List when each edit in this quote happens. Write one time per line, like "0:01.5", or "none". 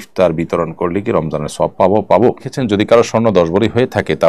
0:02.5